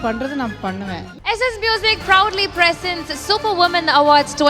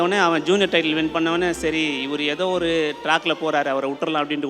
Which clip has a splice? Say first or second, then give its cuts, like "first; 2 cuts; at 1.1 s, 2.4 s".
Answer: first; 1 cut; at 1.1 s